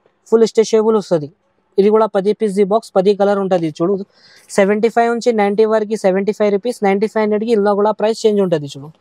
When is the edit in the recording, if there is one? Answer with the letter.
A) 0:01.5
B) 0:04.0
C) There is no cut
C